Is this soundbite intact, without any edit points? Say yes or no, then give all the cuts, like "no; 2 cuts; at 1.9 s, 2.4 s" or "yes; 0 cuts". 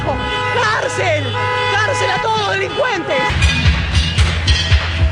no; 1 cut; at 3.3 s